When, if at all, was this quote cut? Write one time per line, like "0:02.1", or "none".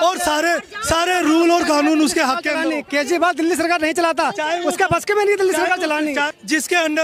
none